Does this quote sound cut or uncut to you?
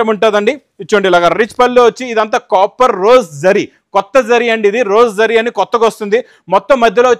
uncut